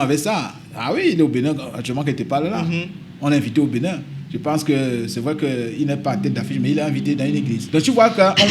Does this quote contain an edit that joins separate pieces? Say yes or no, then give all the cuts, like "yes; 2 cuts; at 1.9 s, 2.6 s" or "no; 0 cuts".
yes; 1 cut; at 7.6 s